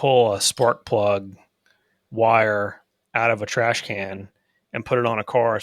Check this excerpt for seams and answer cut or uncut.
uncut